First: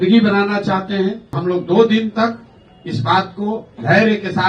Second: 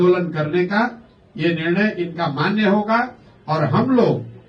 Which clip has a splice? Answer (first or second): first